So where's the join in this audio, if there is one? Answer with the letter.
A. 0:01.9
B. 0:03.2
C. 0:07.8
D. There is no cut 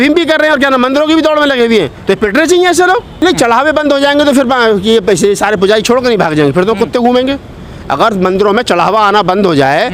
B